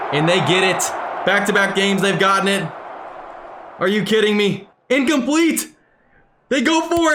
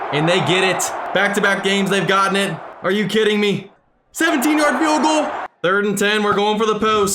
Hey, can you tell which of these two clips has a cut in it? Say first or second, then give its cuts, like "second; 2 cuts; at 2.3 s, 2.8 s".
second; 4 cuts; at 0.9 s, 2.7 s, 3.7 s, 5.4 s